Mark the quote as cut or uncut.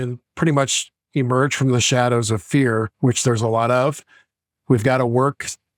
uncut